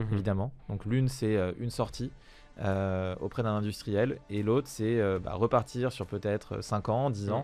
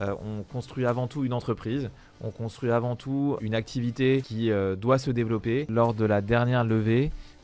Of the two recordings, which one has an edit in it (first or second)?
second